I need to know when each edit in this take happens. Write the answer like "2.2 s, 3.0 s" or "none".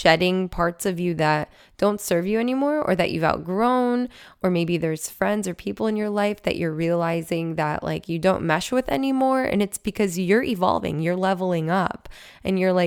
none